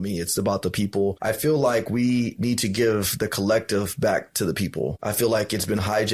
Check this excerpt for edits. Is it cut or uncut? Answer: cut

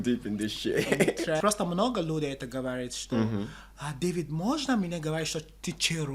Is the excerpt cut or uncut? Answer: cut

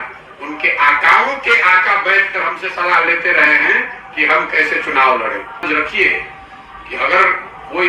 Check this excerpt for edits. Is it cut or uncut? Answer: cut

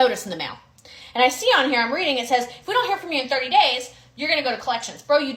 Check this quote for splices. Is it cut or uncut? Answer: uncut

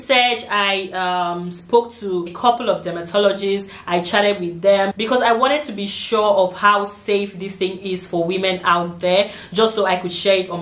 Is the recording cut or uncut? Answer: uncut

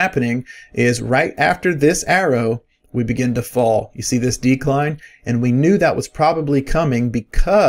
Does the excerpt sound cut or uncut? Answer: uncut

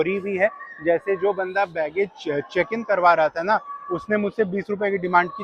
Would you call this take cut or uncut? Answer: uncut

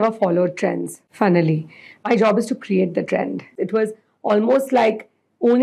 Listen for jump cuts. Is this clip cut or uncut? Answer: cut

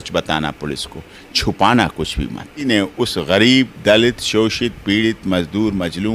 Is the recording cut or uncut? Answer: cut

